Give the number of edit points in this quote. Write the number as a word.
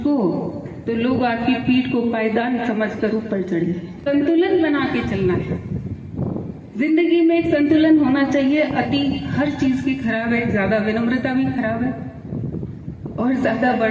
one